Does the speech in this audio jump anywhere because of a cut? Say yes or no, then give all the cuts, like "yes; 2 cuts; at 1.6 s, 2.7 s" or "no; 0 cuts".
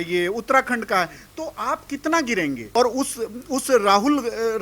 yes; 1 cut; at 2.6 s